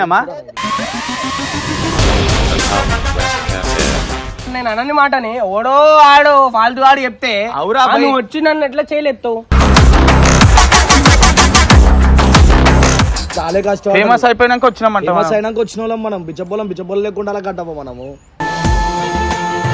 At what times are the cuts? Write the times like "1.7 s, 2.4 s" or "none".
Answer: 4.5 s, 13.2 s